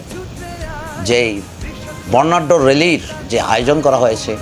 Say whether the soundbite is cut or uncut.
uncut